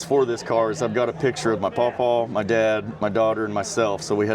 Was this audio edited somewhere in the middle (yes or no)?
yes